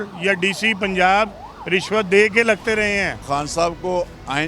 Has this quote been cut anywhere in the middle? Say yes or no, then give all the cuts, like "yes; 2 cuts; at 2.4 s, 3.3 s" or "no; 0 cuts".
yes; 1 cut; at 3.2 s